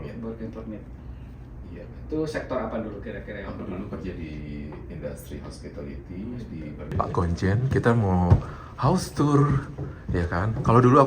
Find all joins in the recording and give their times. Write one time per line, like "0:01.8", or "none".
0:06.8